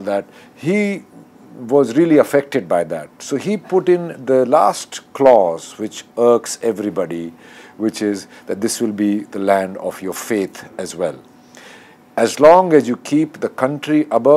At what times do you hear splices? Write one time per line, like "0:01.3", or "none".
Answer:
none